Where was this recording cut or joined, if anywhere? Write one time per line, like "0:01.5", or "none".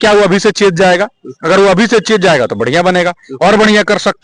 none